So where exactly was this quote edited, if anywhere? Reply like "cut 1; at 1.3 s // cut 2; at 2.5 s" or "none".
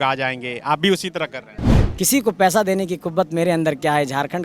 cut 1; at 1.8 s